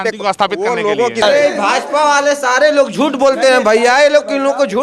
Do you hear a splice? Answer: yes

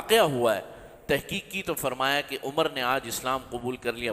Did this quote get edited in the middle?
no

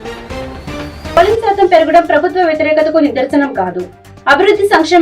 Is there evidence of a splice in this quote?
yes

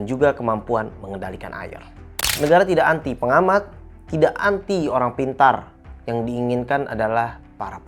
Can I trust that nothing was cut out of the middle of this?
no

